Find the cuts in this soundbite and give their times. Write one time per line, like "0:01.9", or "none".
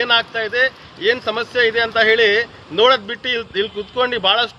none